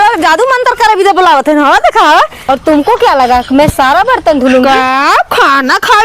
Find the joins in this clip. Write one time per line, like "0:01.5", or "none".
0:02.4